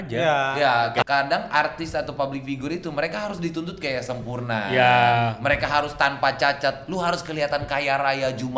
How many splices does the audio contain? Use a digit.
1